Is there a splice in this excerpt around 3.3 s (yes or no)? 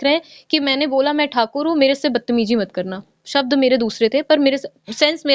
no